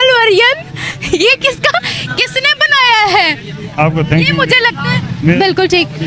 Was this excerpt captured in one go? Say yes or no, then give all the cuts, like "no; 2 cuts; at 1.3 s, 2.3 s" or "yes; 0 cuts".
yes; 0 cuts